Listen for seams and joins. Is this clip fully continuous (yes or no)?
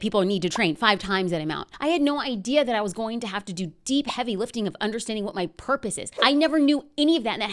no